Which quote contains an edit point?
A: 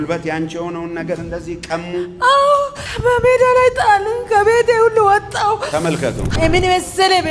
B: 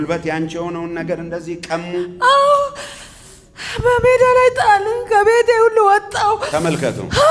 A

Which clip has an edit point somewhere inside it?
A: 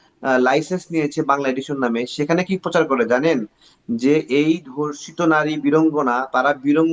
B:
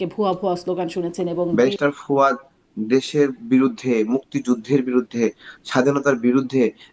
B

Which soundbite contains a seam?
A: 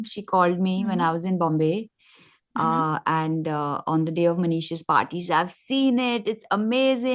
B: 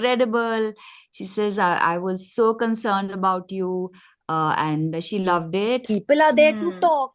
B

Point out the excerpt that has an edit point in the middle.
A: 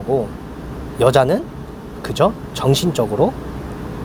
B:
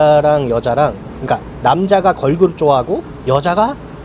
B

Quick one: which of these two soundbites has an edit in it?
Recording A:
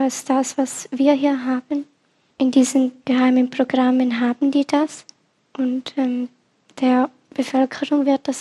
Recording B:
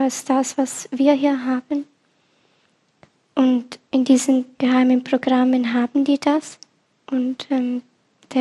A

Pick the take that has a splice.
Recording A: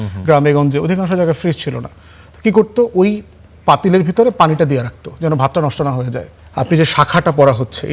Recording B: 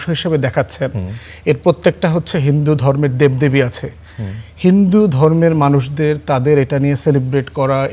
A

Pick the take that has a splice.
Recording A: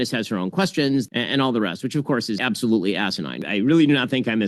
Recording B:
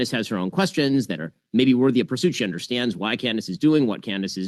A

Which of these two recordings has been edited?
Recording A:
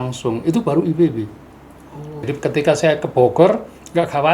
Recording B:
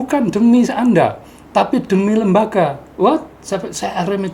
A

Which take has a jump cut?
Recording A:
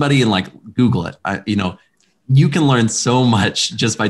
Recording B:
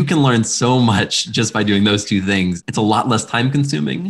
B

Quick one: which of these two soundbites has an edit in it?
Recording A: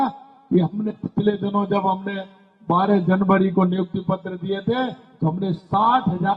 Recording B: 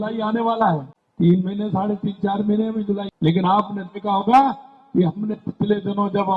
B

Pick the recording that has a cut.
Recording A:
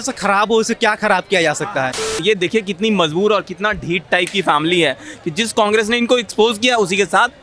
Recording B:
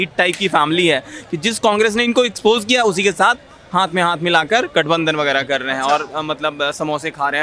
A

